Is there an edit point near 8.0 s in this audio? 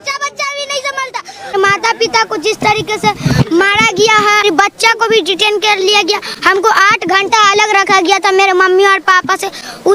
no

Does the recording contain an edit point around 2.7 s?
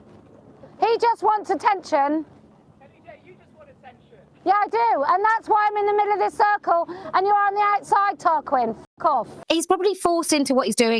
no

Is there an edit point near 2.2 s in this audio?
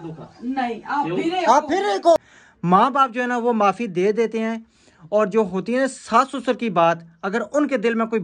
yes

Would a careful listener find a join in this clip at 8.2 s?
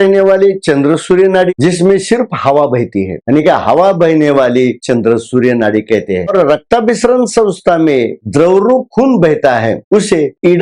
yes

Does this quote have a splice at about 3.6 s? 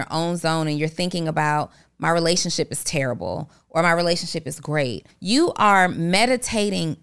no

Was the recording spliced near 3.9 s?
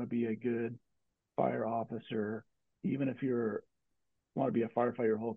yes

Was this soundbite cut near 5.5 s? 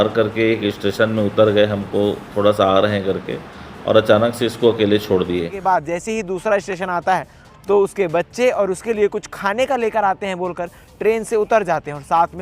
yes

